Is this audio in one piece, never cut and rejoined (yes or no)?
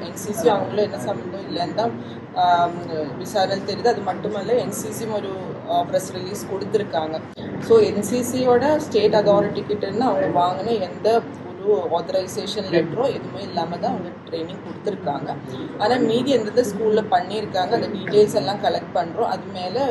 yes